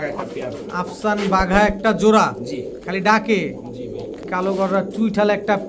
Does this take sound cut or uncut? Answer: cut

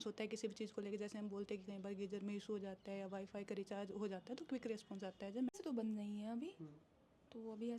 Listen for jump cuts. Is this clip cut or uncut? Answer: cut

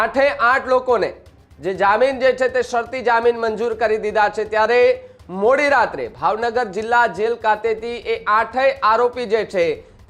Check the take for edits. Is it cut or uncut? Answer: uncut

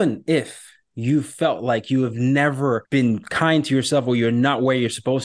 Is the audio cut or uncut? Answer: cut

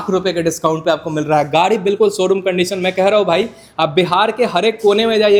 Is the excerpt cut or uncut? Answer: uncut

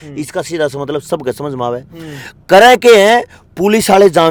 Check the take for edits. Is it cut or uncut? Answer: uncut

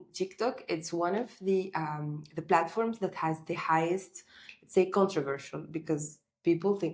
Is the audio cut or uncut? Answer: uncut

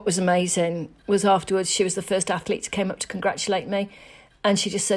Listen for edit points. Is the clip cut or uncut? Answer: cut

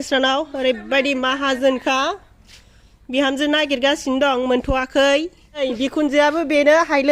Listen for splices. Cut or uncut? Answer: cut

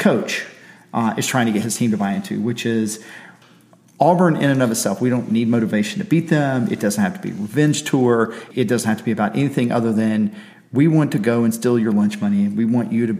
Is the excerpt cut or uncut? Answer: cut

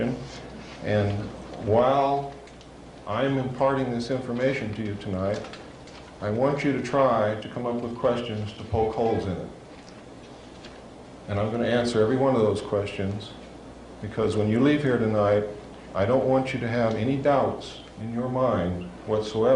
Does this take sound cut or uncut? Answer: cut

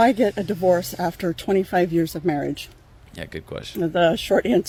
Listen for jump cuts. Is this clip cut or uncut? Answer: uncut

